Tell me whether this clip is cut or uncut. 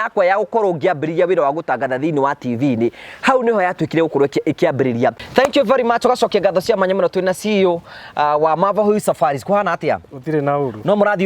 cut